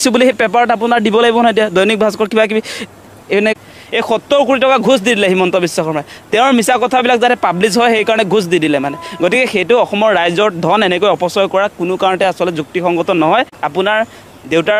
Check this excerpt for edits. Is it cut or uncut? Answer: cut